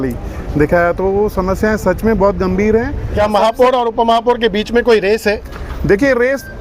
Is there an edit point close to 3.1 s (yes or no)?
yes